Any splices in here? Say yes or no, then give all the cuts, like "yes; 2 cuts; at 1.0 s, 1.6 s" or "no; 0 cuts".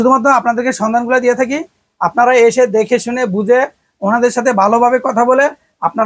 no; 0 cuts